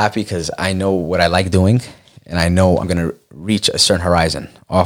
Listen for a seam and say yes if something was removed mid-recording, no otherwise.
yes